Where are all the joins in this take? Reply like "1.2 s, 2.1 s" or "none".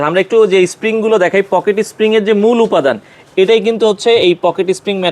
none